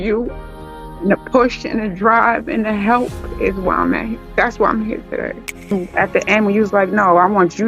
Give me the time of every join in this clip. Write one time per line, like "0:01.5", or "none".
0:05.7